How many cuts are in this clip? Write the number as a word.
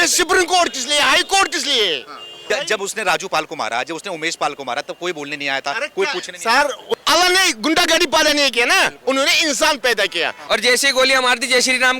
three